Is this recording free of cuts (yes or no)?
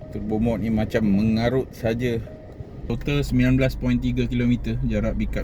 no